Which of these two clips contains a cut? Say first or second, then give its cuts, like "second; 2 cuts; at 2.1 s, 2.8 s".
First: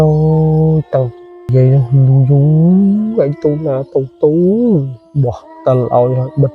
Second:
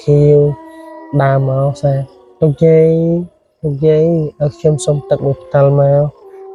first; 1 cut; at 1.5 s